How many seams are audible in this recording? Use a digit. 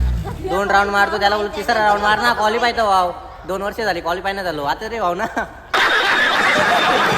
1